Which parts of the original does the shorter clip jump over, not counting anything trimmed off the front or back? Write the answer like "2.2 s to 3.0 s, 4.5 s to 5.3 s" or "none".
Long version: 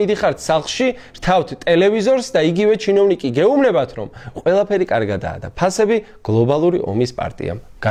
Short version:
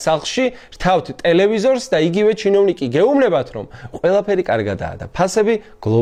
none